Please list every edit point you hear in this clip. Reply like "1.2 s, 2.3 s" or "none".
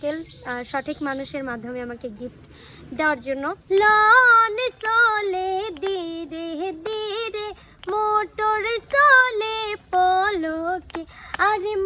3.6 s